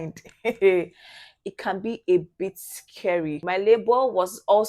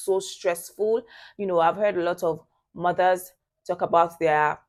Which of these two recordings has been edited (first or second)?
first